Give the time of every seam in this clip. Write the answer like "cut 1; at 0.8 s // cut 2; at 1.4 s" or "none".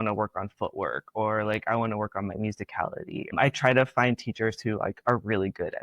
cut 1; at 3.3 s